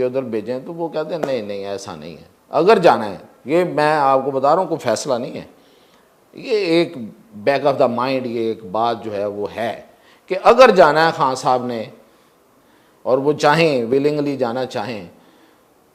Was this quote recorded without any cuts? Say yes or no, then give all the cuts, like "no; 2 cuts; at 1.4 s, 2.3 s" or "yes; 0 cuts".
yes; 0 cuts